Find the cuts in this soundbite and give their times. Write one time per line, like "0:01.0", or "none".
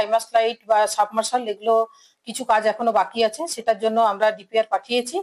none